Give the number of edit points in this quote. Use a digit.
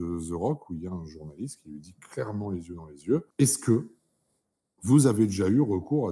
1